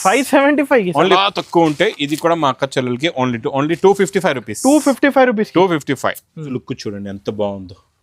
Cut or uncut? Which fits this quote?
cut